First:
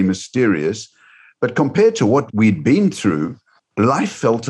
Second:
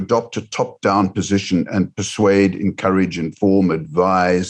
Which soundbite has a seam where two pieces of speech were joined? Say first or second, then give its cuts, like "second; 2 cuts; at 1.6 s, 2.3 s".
first; 2 cuts; at 2.3 s, 3.6 s